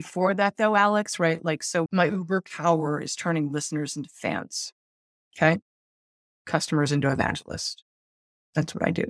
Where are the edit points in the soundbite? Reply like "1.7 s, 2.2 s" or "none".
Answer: 1.9 s